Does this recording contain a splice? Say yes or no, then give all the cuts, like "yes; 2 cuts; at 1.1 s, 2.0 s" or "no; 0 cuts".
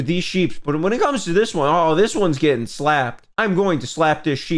no; 0 cuts